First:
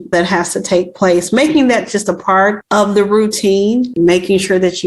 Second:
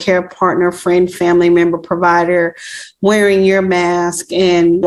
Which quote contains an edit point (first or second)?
first